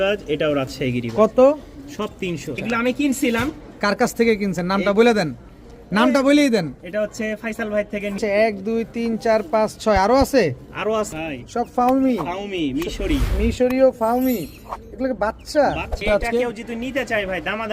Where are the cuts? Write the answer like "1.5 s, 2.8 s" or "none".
2.5 s, 8.2 s, 11.1 s, 16.0 s